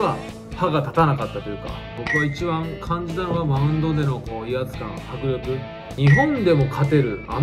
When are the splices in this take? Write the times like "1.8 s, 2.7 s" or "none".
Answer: 1.8 s, 5.9 s